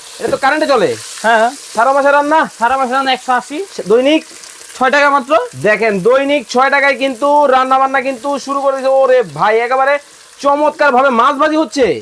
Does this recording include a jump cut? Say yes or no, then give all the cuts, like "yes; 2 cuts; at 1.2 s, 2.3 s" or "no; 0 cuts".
no; 0 cuts